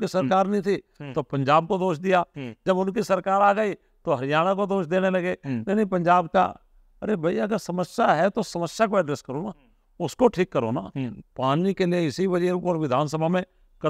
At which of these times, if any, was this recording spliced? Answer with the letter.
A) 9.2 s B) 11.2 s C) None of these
B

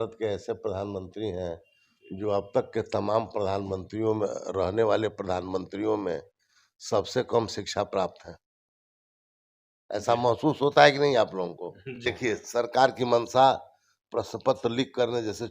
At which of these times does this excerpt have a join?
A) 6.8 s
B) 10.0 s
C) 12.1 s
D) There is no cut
C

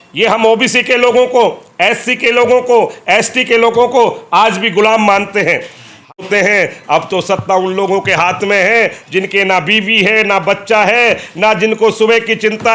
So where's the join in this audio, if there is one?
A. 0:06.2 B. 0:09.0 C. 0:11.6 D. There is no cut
A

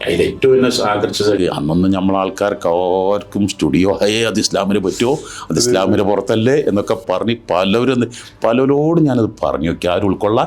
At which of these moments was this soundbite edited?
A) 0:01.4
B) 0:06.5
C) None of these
A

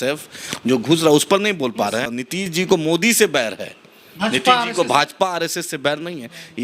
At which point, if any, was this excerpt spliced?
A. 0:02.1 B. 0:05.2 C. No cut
A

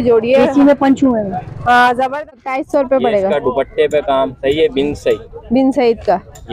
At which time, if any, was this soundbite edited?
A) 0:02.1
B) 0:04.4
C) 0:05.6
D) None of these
A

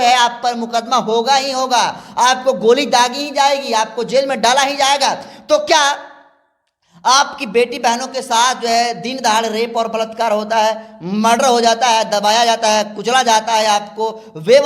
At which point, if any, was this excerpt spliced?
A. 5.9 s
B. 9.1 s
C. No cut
C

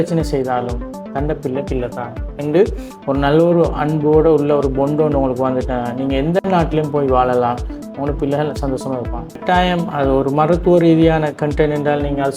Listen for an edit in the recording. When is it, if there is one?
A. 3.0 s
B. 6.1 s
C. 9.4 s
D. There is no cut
C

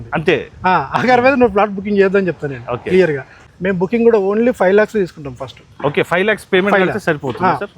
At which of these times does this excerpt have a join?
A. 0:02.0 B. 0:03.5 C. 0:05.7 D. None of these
B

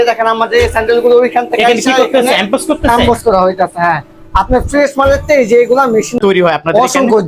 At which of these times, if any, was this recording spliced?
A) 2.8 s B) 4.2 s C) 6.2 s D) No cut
C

